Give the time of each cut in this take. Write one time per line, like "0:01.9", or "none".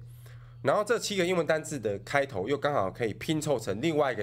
none